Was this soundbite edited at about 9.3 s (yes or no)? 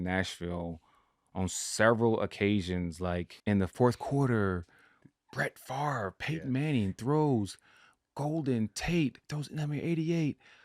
yes